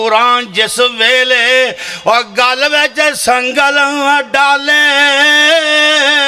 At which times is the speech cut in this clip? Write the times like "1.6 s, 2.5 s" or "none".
none